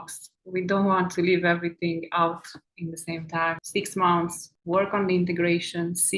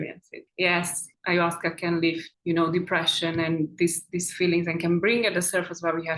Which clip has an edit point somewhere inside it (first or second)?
first